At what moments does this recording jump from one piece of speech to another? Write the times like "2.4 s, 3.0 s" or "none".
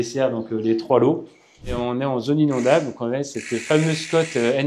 1.7 s